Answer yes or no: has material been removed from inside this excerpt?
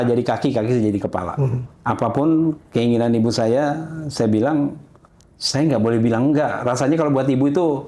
yes